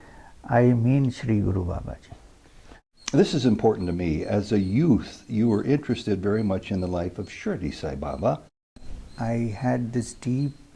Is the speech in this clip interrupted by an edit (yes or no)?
yes